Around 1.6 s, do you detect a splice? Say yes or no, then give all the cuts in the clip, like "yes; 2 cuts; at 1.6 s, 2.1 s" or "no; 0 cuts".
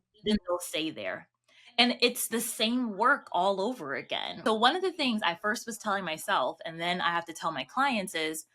no; 1 cut; at 4.4 s